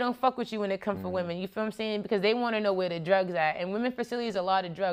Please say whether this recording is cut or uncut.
uncut